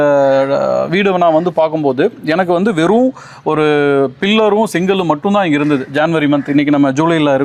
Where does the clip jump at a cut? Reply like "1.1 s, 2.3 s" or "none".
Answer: none